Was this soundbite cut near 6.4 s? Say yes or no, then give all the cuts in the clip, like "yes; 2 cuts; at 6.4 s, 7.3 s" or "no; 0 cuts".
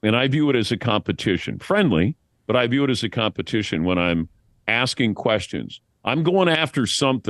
no; 0 cuts